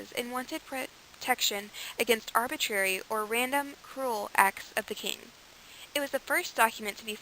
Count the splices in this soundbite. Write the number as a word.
one